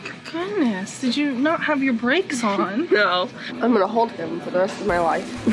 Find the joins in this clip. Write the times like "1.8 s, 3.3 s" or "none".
3.5 s